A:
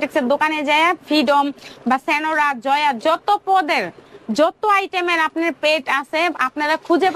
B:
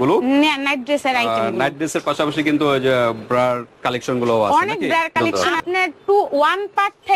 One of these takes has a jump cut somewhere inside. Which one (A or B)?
B